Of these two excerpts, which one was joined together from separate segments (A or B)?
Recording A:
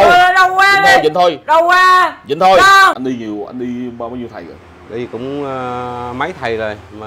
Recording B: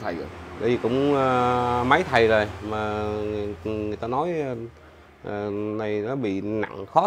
A